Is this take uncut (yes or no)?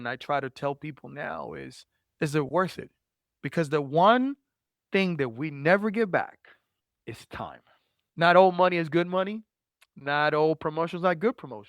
no